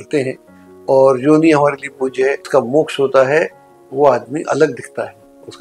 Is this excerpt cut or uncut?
cut